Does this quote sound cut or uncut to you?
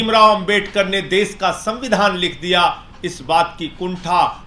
uncut